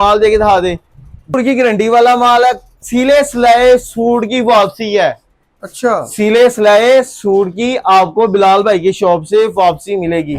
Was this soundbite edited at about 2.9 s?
no; 1 cut; at 1.3 s

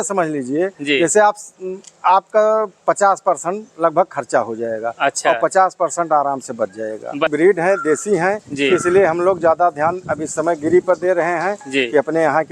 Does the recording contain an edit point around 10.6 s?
no; 1 cut; at 7.3 s

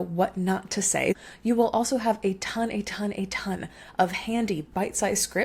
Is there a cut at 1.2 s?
yes; 1 cut; at 1.2 s

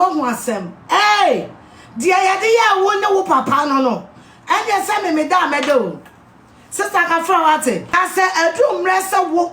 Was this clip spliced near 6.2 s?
no; 1 cut; at 7.9 s

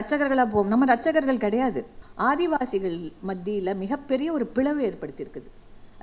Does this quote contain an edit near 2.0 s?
yes; 1 cut; at 2.0 s

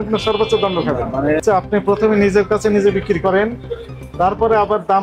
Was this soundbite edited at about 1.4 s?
yes; 1 cut; at 1.4 s

